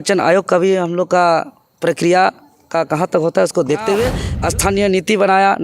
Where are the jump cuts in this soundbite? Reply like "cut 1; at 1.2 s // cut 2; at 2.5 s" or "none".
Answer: cut 1; at 4.3 s